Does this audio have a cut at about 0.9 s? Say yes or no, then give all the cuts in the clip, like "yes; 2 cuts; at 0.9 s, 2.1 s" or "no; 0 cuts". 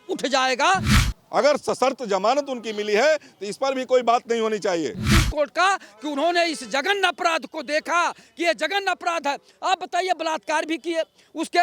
yes; 2 cuts; at 0.9 s, 5.0 s